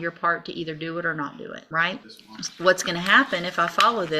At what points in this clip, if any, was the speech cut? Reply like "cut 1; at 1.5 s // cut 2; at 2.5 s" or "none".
cut 1; at 1.6 s // cut 2; at 2.2 s

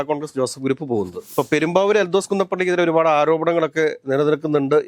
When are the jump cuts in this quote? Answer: cut 1; at 1.2 s

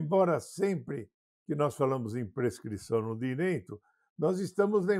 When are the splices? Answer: none

